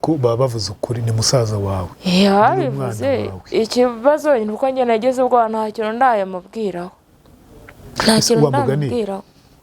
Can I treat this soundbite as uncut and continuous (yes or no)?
yes